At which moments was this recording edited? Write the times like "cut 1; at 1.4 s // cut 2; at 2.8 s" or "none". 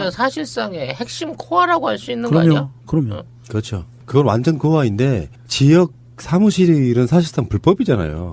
none